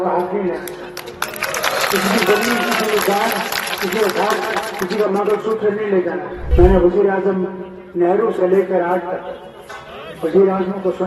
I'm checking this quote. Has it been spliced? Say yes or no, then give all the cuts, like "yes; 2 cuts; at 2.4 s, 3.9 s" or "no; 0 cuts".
yes; 1 cut; at 6.4 s